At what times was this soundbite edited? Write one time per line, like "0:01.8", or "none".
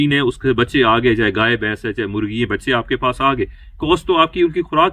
none